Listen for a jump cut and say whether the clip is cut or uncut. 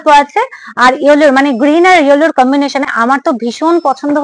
uncut